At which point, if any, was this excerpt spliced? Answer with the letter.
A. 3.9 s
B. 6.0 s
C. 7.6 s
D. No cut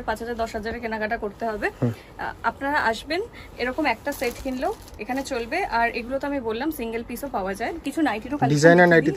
C